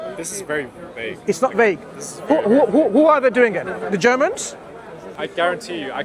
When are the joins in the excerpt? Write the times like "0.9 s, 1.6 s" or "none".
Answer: 5.1 s